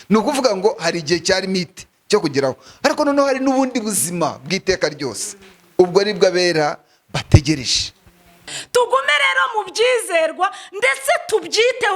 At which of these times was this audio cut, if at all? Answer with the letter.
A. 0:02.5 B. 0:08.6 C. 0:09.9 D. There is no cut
B